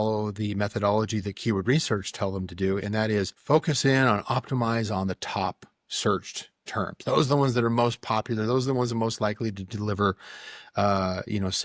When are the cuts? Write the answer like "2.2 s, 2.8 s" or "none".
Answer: 3.4 s